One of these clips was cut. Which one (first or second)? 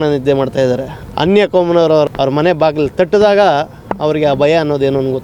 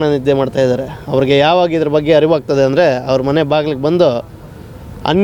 first